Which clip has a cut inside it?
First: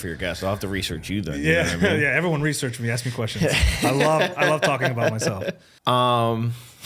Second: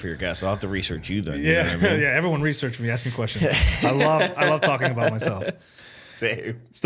first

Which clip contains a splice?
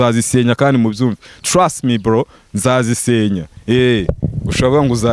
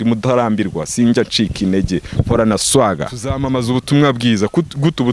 second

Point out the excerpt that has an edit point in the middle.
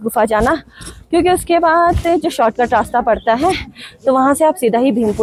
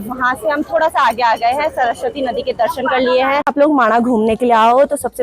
second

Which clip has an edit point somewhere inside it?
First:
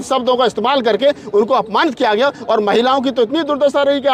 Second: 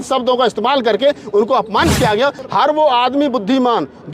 second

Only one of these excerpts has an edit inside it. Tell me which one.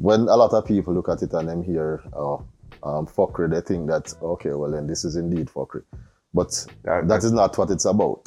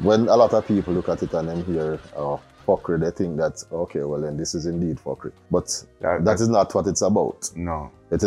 second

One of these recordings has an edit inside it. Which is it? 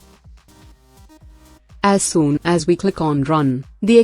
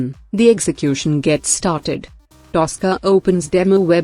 first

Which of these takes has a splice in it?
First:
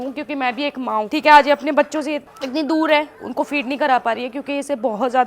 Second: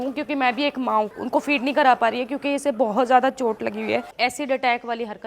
second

